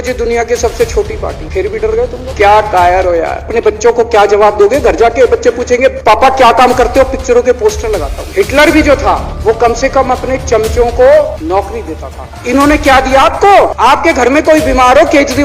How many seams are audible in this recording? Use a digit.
3